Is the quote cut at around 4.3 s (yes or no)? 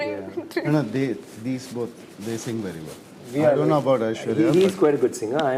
no